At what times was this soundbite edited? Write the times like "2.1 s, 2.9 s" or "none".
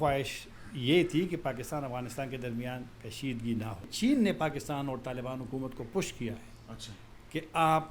3.9 s